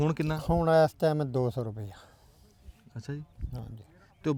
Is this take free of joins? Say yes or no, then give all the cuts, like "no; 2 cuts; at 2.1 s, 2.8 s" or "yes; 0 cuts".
yes; 0 cuts